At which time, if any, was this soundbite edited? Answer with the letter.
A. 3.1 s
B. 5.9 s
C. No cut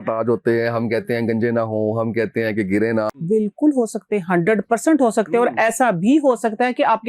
A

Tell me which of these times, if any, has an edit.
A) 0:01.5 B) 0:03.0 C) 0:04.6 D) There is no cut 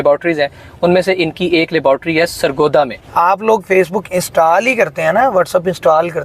B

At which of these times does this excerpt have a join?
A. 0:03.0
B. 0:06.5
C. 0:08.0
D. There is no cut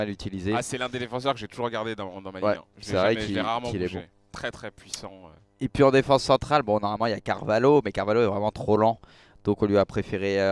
C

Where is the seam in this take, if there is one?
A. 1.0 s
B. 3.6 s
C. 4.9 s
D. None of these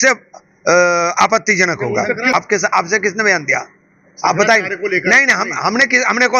D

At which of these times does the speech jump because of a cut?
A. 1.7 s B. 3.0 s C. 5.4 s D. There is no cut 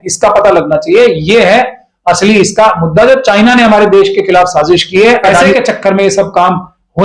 C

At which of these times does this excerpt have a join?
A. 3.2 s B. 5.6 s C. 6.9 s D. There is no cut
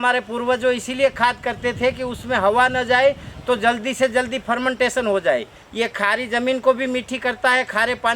B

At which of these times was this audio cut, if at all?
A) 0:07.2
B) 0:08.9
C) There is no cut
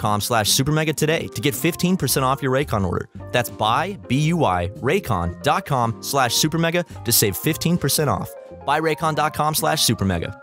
C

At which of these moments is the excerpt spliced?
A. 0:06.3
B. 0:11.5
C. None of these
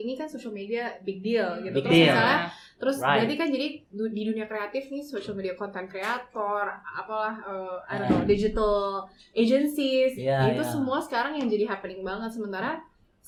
C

